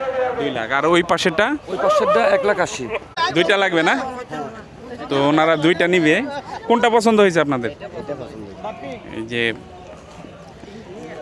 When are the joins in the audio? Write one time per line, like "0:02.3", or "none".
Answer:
0:03.1